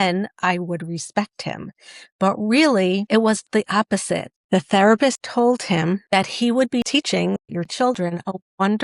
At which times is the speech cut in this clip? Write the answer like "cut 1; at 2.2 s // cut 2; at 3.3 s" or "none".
cut 1; at 3.1 s // cut 2; at 4.3 s // cut 3; at 5.2 s // cut 4; at 6.0 s